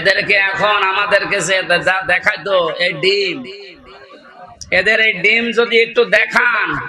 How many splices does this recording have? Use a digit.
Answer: 0